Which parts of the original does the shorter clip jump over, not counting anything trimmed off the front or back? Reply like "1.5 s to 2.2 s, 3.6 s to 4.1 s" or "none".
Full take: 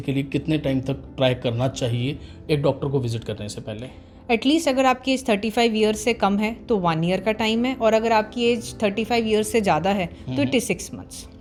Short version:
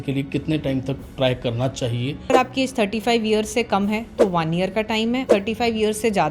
2.3 s to 4.8 s, 7.7 s to 8.7 s